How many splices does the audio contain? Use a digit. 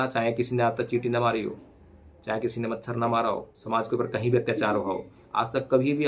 1